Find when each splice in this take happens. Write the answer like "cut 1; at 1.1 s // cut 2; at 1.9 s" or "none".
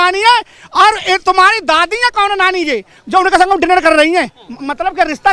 none